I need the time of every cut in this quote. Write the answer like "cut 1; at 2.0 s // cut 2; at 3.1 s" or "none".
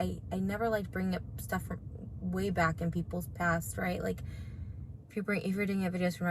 cut 1; at 1.2 s